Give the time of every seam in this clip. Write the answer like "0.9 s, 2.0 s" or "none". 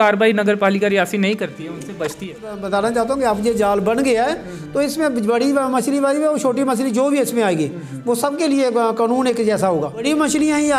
2.6 s, 10.0 s